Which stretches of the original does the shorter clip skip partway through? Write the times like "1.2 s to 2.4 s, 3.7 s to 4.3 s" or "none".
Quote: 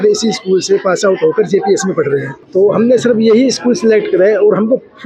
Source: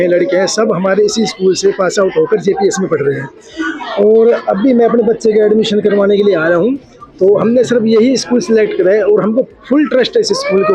3.3 s to 7.0 s